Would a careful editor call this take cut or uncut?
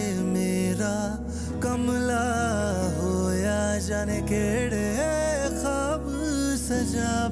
uncut